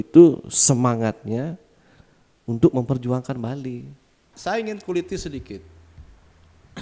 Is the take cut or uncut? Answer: cut